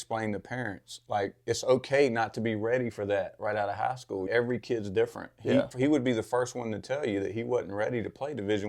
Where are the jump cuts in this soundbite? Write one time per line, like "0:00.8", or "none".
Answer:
0:04.3
0:05.7